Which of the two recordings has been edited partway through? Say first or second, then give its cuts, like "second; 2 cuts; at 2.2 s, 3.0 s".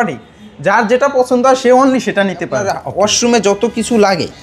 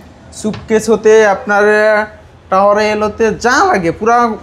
first; 1 cut; at 2.8 s